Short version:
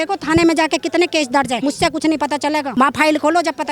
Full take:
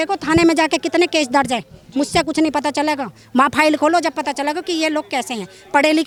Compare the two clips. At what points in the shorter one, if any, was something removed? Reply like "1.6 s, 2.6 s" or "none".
1.6 s, 2.7 s